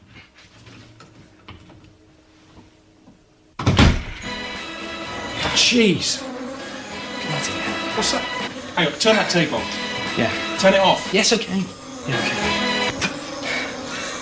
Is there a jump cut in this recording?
yes; 1 cut; at 12.8 s

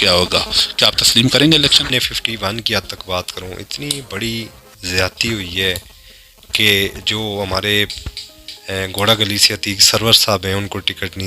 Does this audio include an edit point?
yes; 1 cut; at 1.9 s

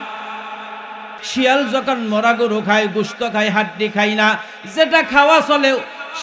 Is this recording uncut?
no; 1 cut; at 1.1 s

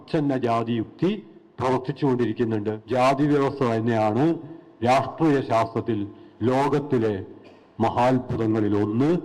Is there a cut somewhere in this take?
yes; 1 cut; at 2.8 s

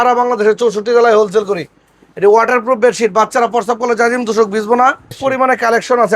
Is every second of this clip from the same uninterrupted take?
no; 1 cut; at 5.1 s

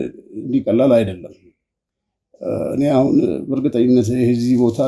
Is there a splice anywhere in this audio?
no; 0 cuts

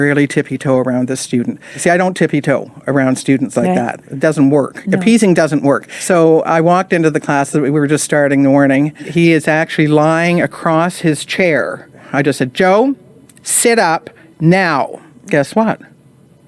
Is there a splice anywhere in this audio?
yes; 5 cuts; at 1.7 s, 5.9 s, 9.1 s, 12.0 s, 15.1 s

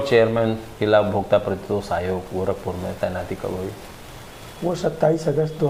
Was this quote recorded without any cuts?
yes; 0 cuts

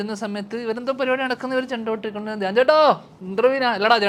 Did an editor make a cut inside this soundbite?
no; 0 cuts

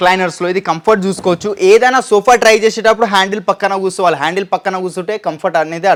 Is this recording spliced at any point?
no; 0 cuts

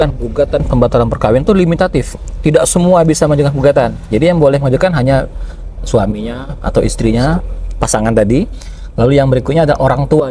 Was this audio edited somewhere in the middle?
no; 0 cuts

